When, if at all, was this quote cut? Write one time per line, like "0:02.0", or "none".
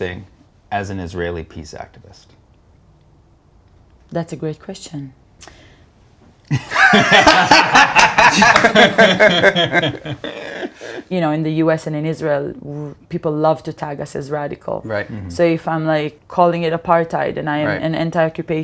0:02.8
0:11.0
0:16.2